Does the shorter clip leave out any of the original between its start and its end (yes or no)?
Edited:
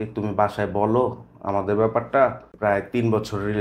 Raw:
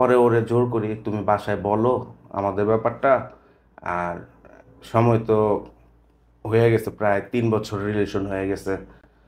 yes